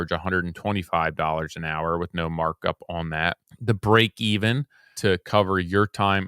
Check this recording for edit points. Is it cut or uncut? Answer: cut